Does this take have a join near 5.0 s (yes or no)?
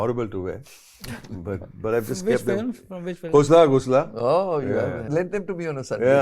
yes